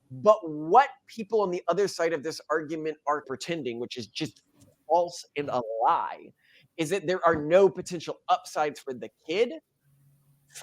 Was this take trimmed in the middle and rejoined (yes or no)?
yes